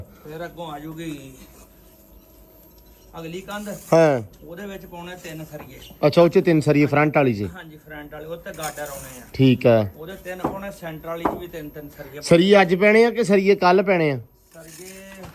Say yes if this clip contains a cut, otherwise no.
no